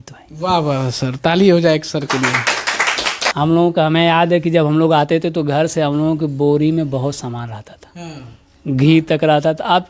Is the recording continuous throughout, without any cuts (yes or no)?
no